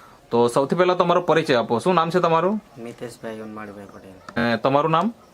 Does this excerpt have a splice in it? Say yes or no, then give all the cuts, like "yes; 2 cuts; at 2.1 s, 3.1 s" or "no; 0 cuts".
yes; 1 cut; at 4.4 s